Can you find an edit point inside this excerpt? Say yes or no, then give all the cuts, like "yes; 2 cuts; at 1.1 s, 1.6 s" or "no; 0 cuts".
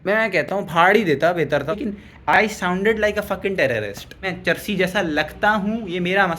yes; 2 cuts; at 1.8 s, 4.2 s